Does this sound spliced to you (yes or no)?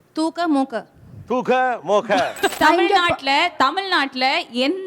yes